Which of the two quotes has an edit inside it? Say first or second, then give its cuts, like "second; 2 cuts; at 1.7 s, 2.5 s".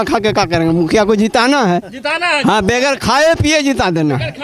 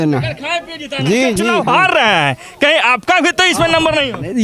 second; 1 cut; at 1.6 s